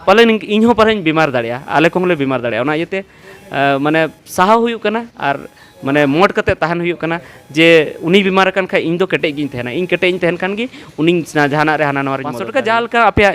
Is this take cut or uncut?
cut